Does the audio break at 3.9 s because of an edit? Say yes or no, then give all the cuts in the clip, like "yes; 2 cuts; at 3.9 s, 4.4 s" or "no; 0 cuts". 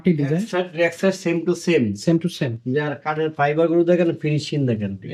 no; 0 cuts